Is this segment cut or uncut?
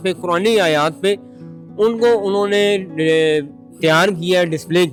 uncut